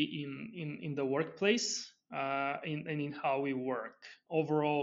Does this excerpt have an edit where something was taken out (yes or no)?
no